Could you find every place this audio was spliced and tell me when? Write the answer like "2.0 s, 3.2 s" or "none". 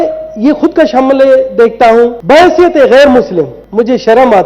2.2 s, 3.6 s